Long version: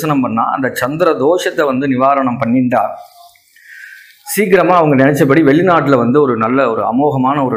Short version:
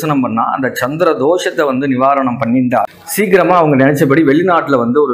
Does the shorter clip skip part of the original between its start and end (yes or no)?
yes